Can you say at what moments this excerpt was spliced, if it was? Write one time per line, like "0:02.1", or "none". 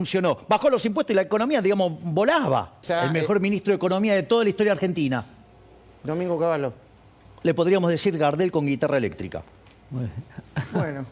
0:02.8

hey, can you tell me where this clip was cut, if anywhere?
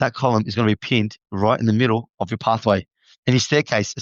none

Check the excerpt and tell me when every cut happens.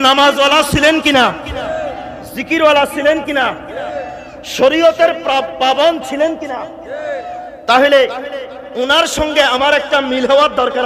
none

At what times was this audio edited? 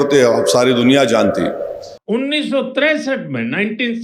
0:01.9

